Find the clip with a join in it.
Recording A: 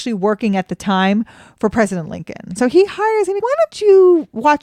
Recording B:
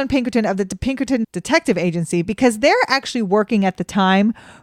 A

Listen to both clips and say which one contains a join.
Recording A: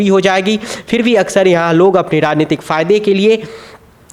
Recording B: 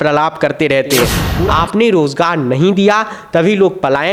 B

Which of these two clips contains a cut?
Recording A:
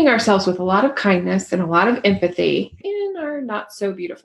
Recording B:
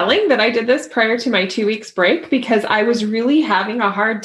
A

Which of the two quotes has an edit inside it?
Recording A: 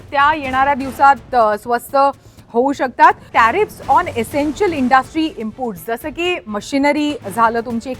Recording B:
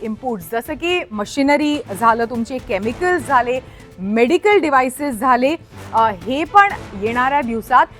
A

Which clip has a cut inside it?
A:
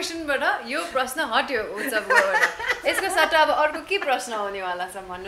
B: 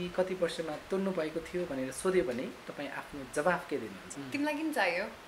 B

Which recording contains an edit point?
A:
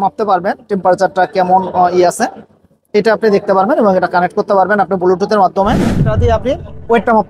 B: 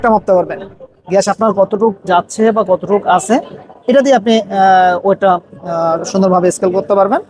A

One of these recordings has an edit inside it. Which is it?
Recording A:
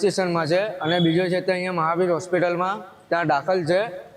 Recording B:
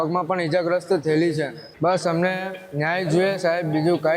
B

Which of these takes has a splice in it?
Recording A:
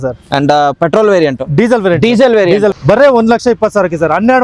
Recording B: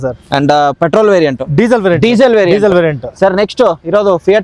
A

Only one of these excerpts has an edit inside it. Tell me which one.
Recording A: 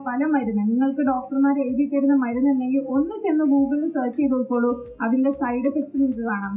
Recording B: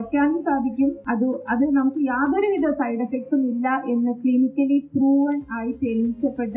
B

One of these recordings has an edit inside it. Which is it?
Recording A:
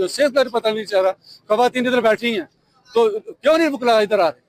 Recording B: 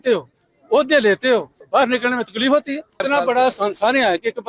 B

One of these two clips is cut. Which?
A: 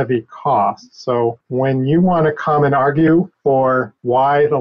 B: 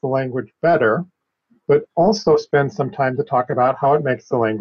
A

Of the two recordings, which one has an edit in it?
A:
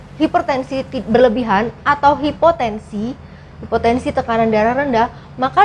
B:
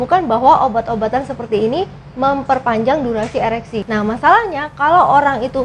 B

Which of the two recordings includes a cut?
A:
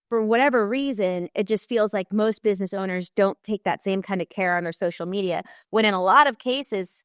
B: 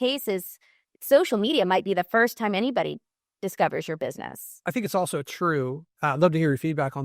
B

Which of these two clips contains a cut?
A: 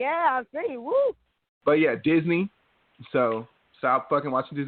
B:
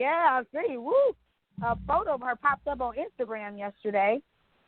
A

